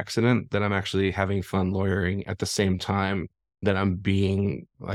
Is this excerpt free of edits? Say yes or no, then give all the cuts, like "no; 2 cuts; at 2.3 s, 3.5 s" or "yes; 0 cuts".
yes; 0 cuts